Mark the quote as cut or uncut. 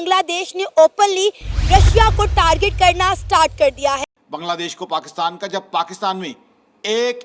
cut